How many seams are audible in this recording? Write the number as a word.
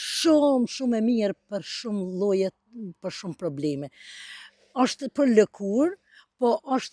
zero